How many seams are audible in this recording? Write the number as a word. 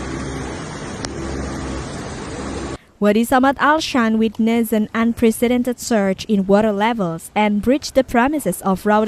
zero